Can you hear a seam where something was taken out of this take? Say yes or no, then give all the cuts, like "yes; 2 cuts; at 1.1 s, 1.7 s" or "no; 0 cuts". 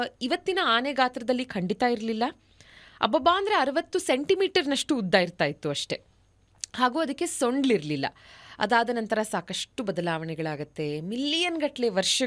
no; 0 cuts